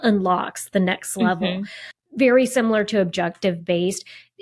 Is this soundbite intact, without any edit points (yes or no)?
no